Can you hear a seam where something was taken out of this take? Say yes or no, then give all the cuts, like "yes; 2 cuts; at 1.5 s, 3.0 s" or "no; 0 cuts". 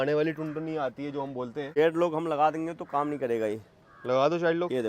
yes; 1 cut; at 1.7 s